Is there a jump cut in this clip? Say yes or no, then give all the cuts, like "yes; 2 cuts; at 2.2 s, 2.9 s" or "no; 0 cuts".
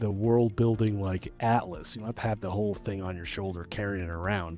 no; 0 cuts